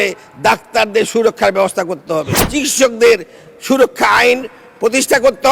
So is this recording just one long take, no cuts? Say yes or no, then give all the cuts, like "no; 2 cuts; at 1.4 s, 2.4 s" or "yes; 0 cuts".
no; 1 cut; at 2.4 s